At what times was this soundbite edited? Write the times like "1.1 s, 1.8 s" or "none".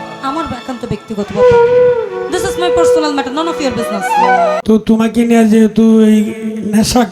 4.6 s